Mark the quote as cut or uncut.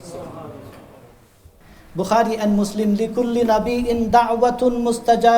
cut